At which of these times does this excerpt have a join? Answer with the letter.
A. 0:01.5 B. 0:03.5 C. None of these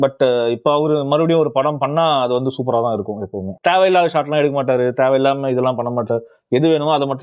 B